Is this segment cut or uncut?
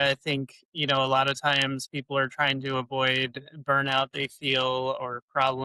uncut